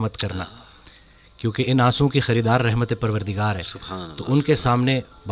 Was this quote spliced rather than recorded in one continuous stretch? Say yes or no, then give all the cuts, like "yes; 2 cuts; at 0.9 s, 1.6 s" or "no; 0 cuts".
no; 0 cuts